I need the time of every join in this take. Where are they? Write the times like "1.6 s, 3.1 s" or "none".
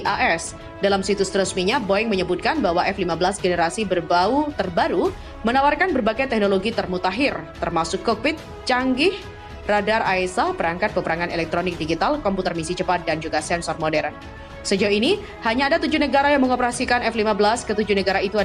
none